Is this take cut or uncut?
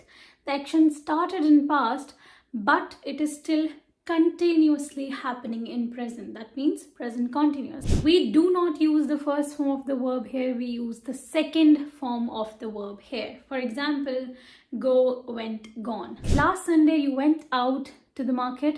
cut